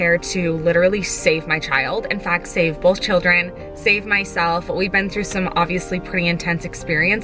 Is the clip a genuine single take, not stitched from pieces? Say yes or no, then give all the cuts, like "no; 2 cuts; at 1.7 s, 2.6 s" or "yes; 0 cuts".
yes; 0 cuts